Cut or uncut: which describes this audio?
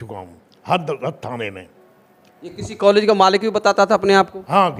uncut